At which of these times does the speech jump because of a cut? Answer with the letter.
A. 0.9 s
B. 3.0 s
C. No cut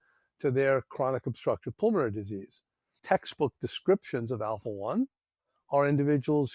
B